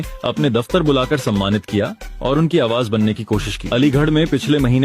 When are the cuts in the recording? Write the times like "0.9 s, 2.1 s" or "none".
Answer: 3.6 s